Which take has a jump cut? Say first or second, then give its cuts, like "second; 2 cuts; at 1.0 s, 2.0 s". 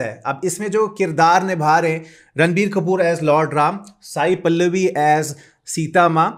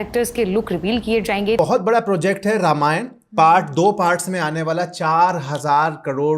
second; 1 cut; at 1.6 s